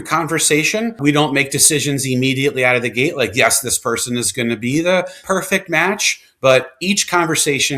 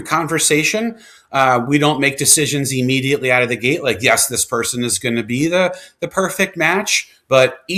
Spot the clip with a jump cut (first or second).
first